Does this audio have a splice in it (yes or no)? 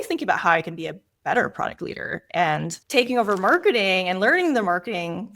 no